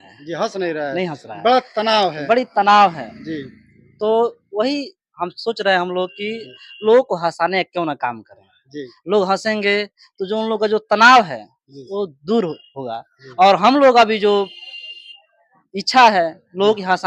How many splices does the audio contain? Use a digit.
0